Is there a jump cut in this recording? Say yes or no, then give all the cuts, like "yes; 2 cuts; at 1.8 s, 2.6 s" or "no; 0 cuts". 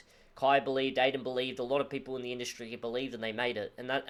no; 0 cuts